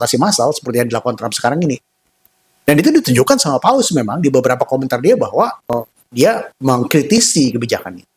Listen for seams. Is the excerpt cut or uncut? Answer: uncut